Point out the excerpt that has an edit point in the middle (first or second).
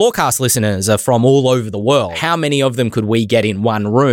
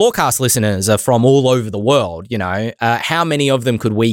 first